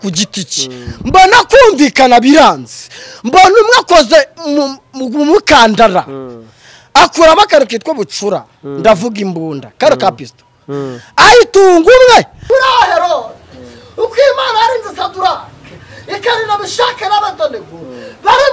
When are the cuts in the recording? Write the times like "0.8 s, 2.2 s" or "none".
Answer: 12.4 s